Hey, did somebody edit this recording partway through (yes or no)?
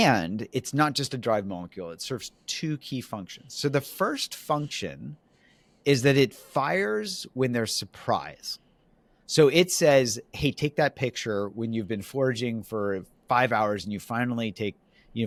no